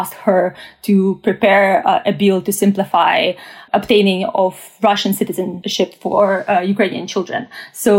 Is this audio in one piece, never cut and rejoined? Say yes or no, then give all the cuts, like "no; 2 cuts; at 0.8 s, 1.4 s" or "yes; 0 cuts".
no; 2 cuts; at 3.5 s, 5.6 s